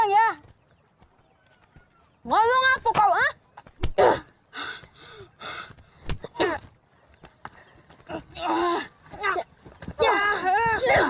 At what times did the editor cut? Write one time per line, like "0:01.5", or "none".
none